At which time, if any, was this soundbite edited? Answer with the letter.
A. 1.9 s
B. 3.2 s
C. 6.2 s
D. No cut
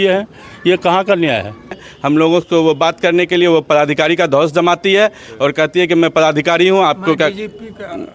A